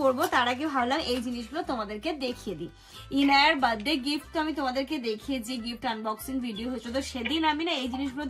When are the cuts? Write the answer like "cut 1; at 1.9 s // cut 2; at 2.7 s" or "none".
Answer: none